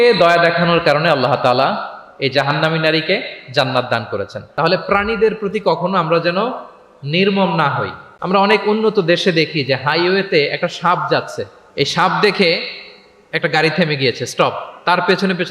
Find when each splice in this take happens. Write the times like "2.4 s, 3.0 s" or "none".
4.4 s, 8.1 s